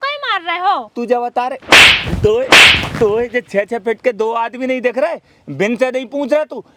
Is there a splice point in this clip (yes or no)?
no